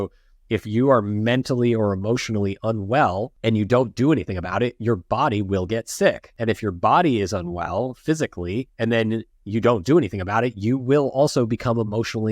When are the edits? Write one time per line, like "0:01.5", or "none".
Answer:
0:03.3
0:06.3
0:08.7